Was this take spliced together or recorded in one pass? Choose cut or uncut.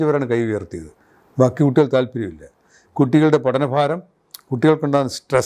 cut